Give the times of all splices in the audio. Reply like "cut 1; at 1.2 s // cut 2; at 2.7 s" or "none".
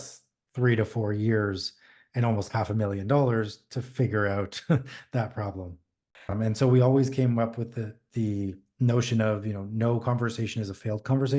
cut 1; at 6.3 s